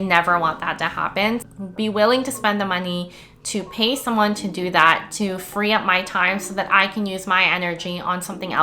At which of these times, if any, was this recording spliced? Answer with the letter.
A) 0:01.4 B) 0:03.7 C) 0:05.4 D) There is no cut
A